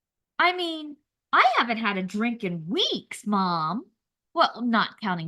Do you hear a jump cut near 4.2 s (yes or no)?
no